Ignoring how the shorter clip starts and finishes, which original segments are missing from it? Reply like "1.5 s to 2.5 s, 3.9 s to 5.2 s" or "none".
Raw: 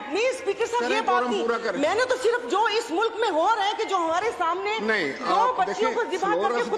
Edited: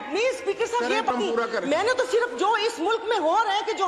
1.1 s to 1.2 s